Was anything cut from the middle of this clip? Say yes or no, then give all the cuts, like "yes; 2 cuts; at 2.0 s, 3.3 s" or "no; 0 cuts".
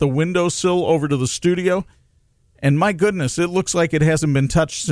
no; 0 cuts